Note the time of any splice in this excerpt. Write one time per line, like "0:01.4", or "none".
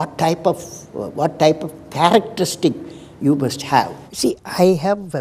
0:04.1